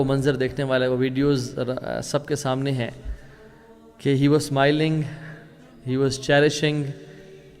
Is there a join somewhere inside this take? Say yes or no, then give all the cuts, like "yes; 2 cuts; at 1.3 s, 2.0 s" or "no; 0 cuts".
no; 0 cuts